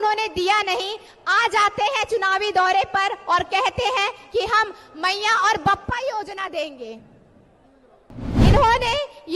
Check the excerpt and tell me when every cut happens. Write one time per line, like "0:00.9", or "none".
0:08.3